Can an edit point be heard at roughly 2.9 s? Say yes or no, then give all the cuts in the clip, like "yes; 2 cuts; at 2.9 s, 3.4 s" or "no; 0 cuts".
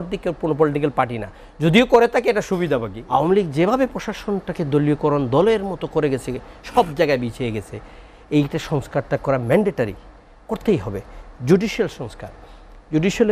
yes; 1 cut; at 2.9 s